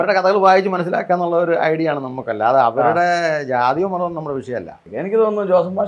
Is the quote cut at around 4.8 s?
yes; 1 cut; at 4.8 s

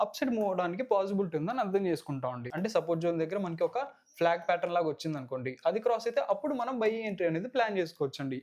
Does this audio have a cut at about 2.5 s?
yes; 1 cut; at 2.5 s

